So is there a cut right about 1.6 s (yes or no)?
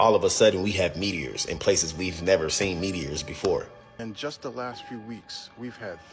no